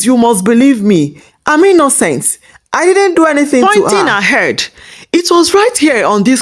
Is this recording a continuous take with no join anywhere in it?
no; 1 cut; at 3.6 s

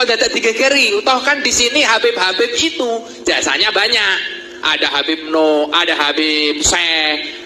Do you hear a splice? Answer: no; 0 cuts

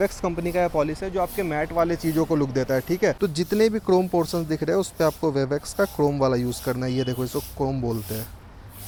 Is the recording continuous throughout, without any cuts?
yes; 0 cuts

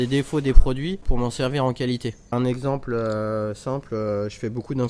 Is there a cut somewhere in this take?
yes; 2 cuts; at 1.0 s, 2.3 s

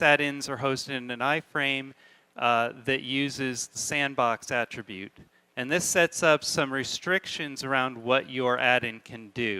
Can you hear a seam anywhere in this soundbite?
yes; 1 cut; at 7.3 s

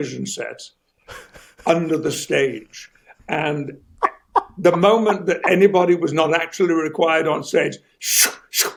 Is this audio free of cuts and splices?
yes; 0 cuts

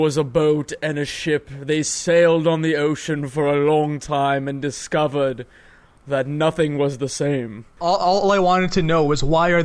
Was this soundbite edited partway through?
yes; 1 cut; at 7.8 s

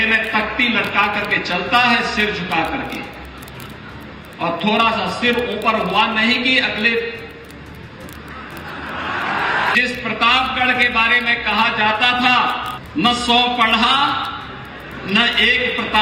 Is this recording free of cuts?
no; 2 cuts; at 9.7 s, 12.7 s

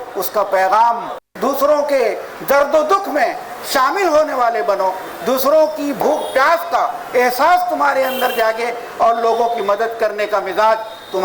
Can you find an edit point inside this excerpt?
yes; 1 cut; at 1.3 s

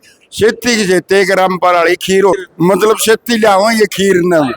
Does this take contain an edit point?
yes; 1 cut; at 2.3 s

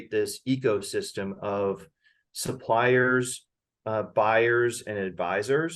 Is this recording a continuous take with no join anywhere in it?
yes; 0 cuts

